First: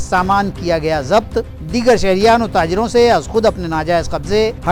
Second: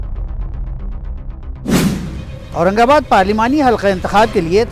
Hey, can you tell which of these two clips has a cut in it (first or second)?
second